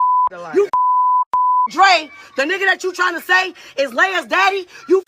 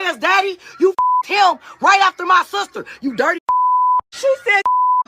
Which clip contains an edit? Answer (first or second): second